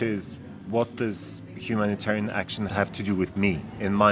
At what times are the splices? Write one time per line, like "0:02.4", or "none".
0:02.7